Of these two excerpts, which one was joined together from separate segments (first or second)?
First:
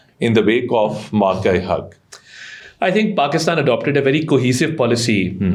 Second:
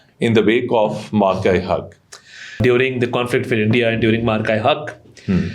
second